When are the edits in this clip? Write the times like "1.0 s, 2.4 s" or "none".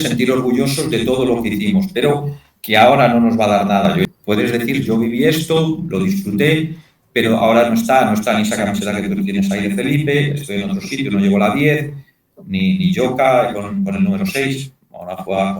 4.0 s